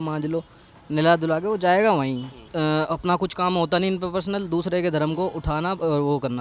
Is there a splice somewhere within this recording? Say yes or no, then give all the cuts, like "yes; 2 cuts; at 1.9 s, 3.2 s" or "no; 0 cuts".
yes; 1 cut; at 2.4 s